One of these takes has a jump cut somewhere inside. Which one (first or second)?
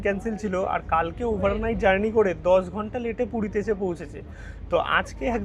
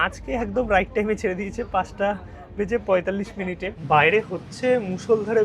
second